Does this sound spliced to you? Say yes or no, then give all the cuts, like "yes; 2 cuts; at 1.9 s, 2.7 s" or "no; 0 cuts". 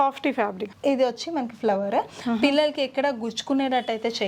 no; 0 cuts